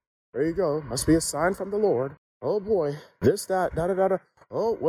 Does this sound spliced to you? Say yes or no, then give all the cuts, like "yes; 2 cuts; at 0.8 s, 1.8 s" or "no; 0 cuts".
yes; 1 cut; at 2.2 s